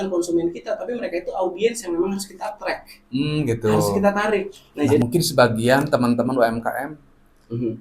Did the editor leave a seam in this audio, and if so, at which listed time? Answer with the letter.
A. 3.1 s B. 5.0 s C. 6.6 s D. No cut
B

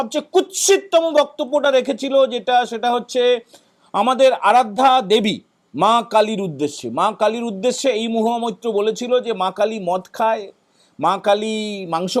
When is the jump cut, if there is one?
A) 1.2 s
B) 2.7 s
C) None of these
C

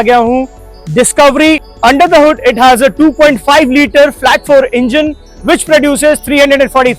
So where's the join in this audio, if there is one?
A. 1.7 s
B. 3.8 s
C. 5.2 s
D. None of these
A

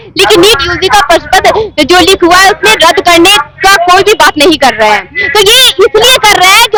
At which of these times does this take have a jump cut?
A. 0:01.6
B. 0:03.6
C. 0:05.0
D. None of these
D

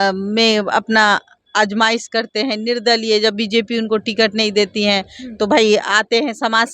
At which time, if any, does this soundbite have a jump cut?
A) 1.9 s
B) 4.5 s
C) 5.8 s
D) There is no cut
D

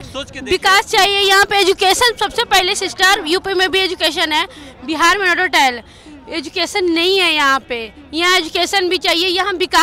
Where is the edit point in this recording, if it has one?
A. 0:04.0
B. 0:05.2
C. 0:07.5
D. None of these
D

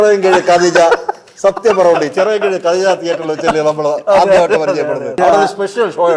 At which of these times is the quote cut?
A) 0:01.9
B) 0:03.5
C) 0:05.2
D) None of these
C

